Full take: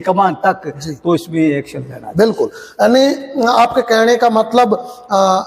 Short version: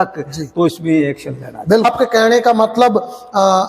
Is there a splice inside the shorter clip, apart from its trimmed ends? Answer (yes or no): yes